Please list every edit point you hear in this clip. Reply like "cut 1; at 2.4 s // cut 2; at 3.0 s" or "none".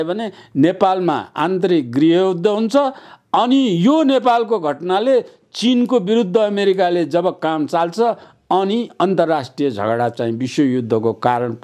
none